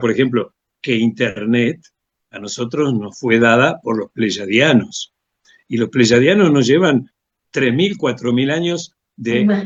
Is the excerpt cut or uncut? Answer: uncut